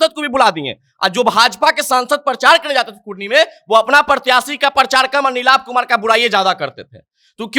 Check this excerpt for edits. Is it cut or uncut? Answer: uncut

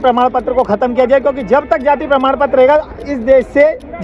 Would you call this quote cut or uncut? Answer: uncut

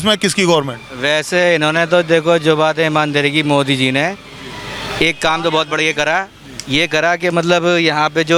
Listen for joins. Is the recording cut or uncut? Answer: uncut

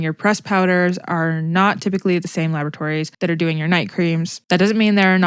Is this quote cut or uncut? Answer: cut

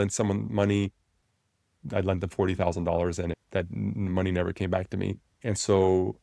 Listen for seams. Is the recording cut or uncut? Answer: cut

